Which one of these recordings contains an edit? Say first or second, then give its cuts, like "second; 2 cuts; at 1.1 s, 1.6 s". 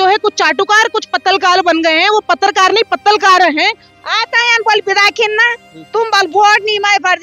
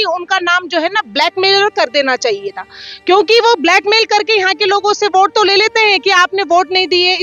first; 1 cut; at 3.9 s